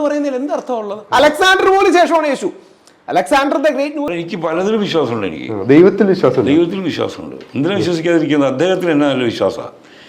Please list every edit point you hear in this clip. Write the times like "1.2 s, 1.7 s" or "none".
4.1 s